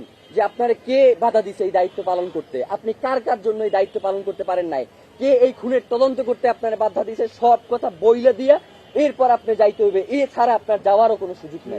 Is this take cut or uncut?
uncut